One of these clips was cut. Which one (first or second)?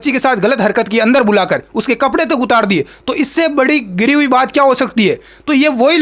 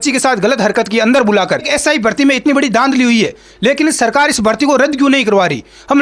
second